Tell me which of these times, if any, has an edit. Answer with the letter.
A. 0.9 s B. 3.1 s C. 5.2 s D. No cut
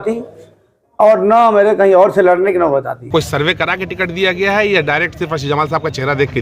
B